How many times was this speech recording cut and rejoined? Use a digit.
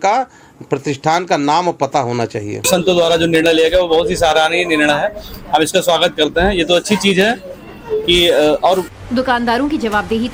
0